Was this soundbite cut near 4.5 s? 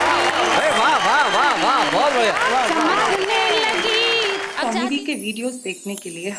yes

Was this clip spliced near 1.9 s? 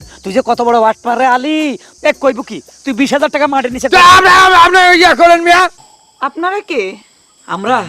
yes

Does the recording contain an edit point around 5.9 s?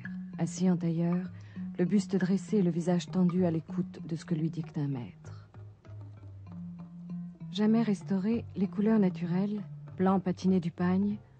yes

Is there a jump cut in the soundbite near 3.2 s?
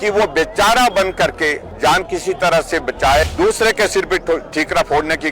yes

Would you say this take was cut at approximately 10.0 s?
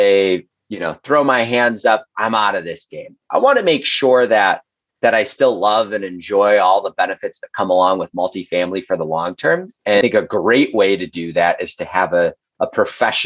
yes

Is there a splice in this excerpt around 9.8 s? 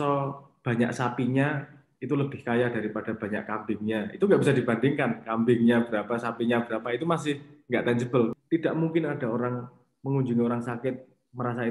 no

